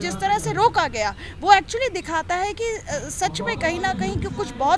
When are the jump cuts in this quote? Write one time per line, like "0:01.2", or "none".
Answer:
none